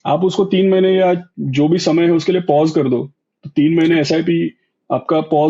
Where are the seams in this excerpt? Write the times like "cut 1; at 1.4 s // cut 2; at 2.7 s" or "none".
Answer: none